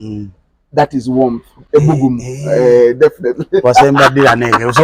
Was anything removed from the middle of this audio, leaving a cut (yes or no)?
no